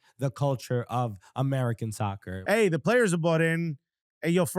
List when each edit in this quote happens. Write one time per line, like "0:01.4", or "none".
0:02.3